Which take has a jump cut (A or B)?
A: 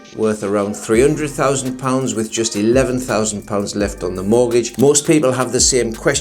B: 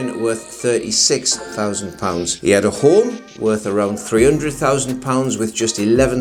A